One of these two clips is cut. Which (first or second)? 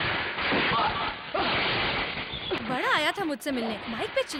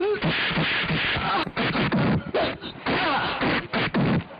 second